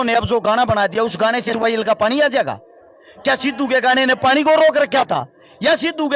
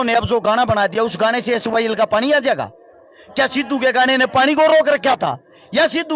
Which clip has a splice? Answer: first; 1 cut; at 1.5 s

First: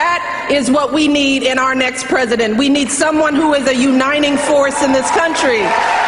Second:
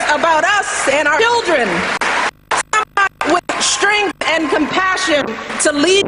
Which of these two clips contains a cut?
second; 1 cut; at 1.9 s

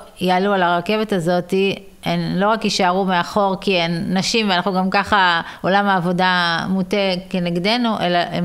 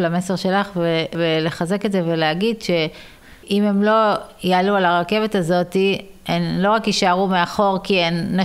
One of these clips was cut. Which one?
second; 2 cuts; at 1.2 s, 3.2 s

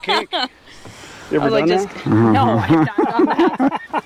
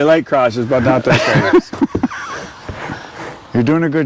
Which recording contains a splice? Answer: second; 1 cut; at 1.7 s

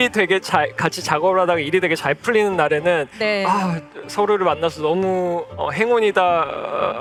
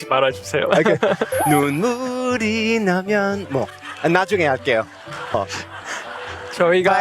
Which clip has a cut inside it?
second; 1 cut; at 5.3 s

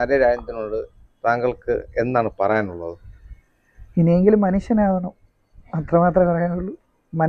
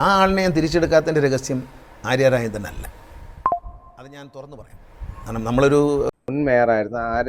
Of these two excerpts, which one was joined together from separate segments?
second; 1 cut; at 6.2 s

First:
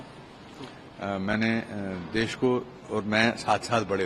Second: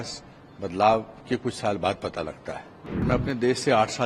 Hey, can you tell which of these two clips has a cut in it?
second; 1 cut; at 3.1 s

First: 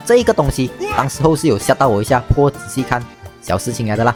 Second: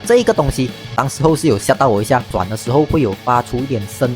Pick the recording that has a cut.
second; 1 cut; at 2.3 s

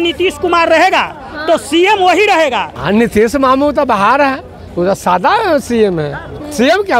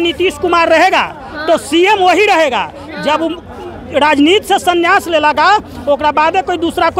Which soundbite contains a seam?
first; 1 cut; at 2.7 s

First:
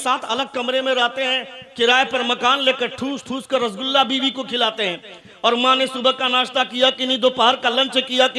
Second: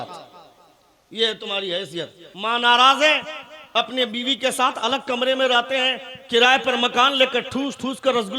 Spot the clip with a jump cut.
second; 1 cut; at 2.2 s

